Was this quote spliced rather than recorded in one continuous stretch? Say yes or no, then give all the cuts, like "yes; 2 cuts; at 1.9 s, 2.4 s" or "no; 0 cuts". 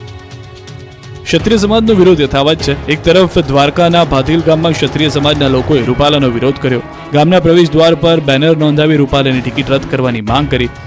no; 0 cuts